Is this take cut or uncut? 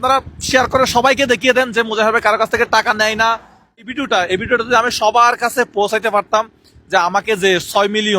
cut